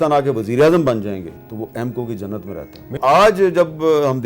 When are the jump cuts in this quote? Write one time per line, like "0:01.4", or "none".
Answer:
0:01.4
0:03.0